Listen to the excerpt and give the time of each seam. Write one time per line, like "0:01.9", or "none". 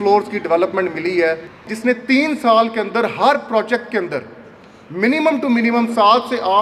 0:01.7